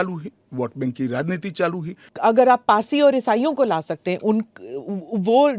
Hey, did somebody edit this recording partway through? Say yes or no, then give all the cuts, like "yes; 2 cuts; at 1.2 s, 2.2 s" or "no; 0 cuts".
yes; 1 cut; at 2.1 s